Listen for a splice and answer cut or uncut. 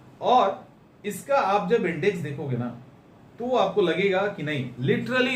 uncut